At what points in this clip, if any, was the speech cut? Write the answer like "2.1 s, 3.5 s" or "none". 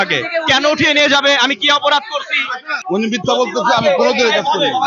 2.7 s